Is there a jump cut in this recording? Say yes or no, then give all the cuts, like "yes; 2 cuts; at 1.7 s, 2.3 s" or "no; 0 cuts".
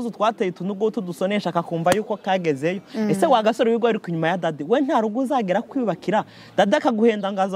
no; 0 cuts